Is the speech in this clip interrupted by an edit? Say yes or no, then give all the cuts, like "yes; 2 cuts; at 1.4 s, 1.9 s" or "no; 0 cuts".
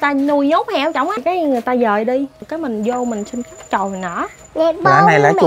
yes; 3 cuts; at 1.2 s, 2.5 s, 4.4 s